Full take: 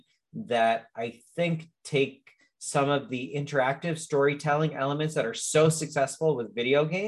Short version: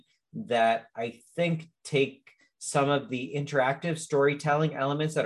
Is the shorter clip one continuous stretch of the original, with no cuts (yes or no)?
yes